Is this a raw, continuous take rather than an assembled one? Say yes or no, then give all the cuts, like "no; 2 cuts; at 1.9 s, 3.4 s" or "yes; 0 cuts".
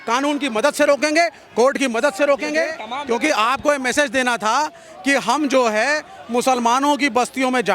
no; 1 cut; at 2.9 s